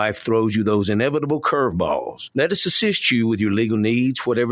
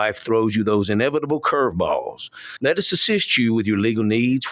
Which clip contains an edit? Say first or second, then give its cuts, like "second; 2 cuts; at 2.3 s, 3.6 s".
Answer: first; 1 cut; at 2.2 s